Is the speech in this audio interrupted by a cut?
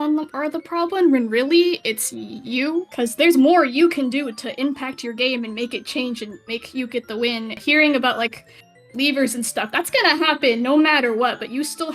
yes; 2 cuts; at 2.9 s, 7.6 s

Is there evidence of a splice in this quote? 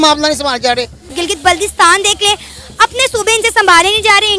yes; 1 cut; at 1.1 s

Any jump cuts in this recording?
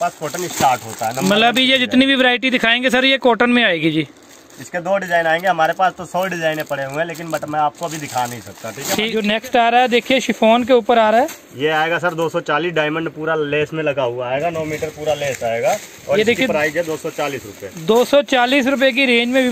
yes; 1 cut; at 9.1 s

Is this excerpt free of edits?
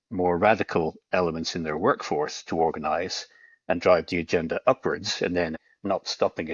no; 1 cut; at 5.6 s

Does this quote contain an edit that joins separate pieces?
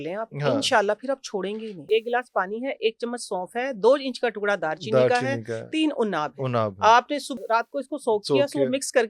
yes; 2 cuts; at 1.8 s, 7.4 s

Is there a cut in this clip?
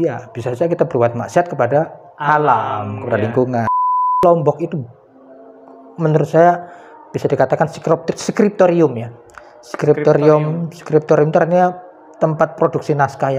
yes; 1 cut; at 4.2 s

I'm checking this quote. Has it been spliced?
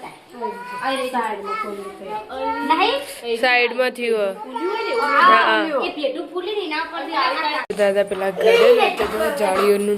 yes; 1 cut; at 7.6 s

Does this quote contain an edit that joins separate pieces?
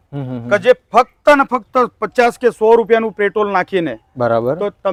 no; 0 cuts

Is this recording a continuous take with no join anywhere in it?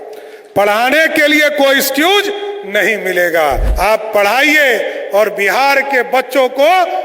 no; 1 cut; at 3.7 s

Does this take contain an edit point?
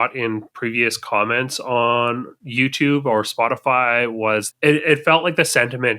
yes; 1 cut; at 4.5 s

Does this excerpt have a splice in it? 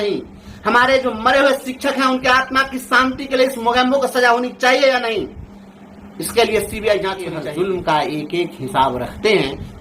yes; 1 cut; at 7.3 s

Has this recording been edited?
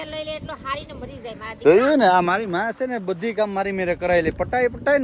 no; 0 cuts

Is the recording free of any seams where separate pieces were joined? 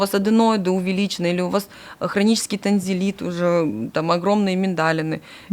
yes; 0 cuts

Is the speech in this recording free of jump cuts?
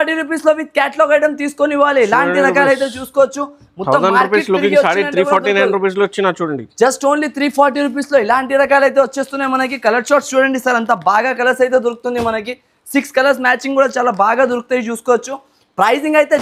yes; 0 cuts

